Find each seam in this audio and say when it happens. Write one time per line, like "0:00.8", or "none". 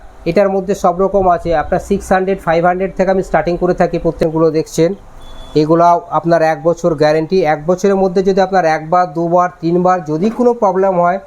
0:04.2

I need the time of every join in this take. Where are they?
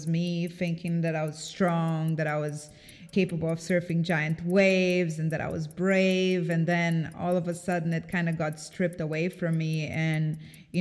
0:03.1

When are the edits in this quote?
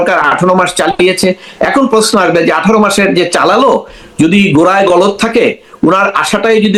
none

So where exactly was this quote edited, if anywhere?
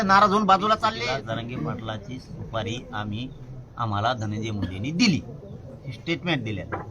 0:01.0

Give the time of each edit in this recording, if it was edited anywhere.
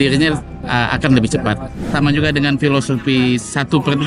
0:01.9

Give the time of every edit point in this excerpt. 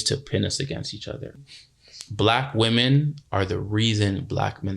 0:01.3

